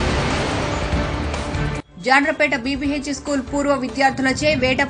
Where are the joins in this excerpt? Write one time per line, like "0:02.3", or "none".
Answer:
none